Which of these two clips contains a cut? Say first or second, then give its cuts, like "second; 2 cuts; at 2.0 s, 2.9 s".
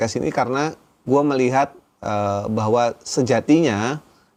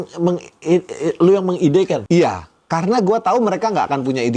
second; 1 cut; at 2.0 s